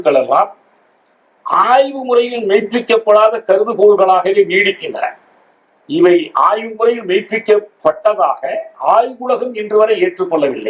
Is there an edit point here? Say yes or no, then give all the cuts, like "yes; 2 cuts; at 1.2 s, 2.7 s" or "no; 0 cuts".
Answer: no; 0 cuts